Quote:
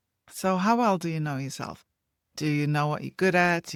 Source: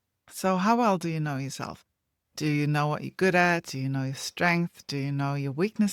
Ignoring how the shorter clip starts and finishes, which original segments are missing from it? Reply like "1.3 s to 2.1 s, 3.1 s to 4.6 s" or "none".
none

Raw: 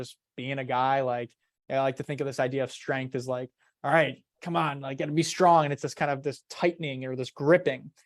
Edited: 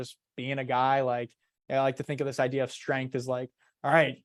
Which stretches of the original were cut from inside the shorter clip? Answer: none

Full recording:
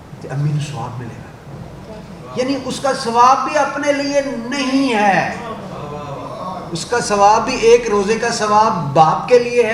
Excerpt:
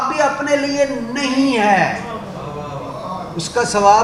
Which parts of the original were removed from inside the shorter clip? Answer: none

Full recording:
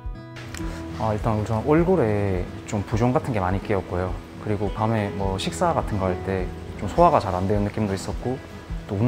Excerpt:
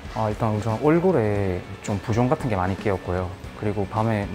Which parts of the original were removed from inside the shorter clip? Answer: none

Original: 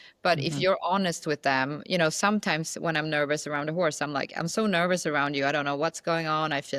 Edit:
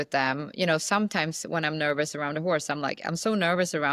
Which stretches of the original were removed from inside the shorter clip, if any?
none

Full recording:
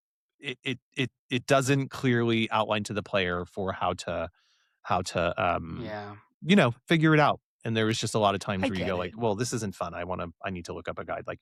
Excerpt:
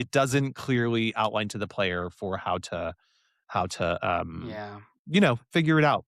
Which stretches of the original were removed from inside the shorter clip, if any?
none

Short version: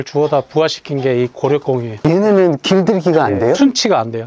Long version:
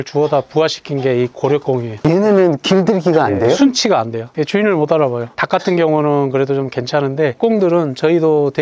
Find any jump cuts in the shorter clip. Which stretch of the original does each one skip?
none

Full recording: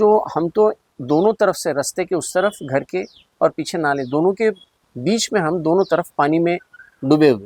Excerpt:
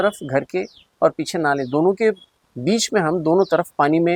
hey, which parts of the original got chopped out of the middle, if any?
none

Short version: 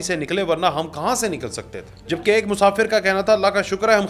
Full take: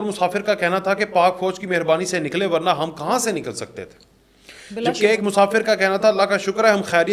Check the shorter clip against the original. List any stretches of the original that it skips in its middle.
4.2 s to 4.9 s

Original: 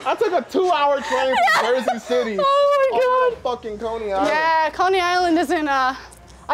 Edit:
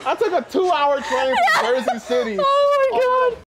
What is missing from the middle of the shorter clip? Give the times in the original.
none

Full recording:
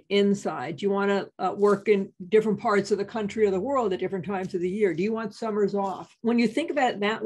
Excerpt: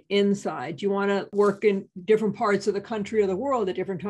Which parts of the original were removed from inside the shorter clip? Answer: 1.3 s to 1.5 s

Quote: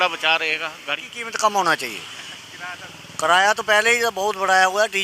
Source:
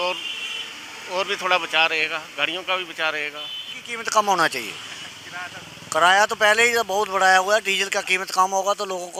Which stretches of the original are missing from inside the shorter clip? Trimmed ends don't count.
2.5 s to 3.7 s

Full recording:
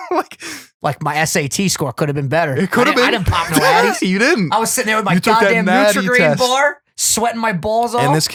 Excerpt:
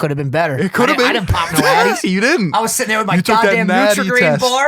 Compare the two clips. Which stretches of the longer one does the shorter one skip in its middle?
none

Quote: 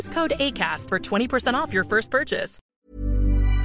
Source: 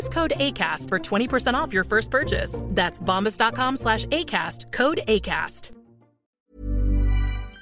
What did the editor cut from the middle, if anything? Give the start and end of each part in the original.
2.6 s to 6.2 s

